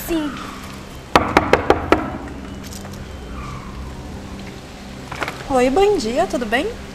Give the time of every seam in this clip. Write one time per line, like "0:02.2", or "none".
none

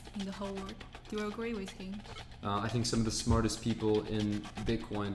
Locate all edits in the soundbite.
0:02.0

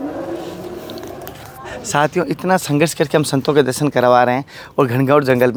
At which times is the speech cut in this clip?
none

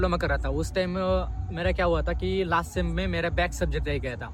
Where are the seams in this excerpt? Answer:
none

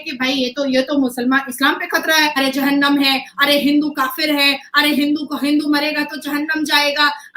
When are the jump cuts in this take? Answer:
0:02.4

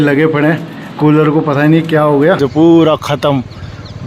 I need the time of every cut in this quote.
0:02.4

